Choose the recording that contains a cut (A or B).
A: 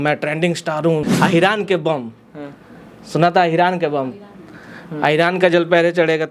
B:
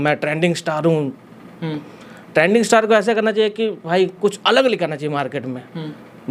A